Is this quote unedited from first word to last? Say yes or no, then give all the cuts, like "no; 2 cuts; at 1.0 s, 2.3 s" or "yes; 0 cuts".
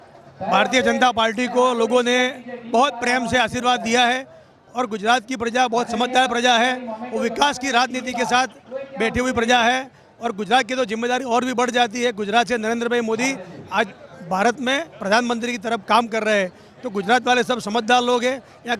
yes; 0 cuts